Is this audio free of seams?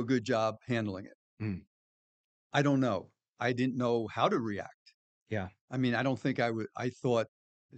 yes; 0 cuts

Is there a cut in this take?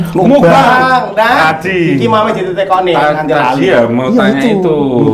no; 0 cuts

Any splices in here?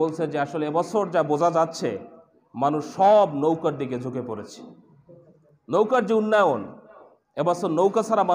no; 0 cuts

